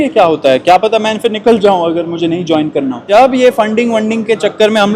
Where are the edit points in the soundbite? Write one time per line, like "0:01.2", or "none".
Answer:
0:03.1